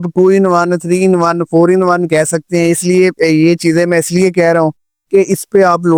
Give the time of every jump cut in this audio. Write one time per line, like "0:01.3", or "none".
none